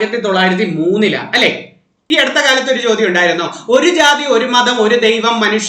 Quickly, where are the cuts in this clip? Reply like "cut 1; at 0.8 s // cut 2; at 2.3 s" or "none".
cut 1; at 2.0 s